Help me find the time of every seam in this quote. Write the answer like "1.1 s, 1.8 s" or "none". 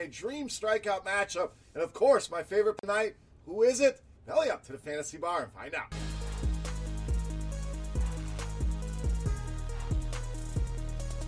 2.8 s